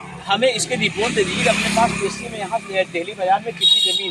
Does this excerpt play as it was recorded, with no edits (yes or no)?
yes